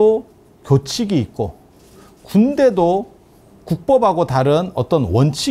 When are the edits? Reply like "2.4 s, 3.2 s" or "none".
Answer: none